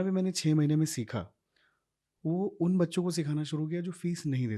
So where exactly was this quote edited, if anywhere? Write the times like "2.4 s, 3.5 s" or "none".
none